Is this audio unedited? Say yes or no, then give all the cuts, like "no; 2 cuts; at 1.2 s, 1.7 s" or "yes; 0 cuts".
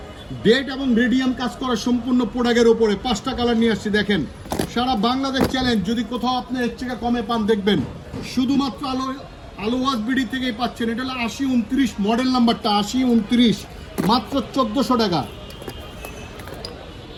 yes; 0 cuts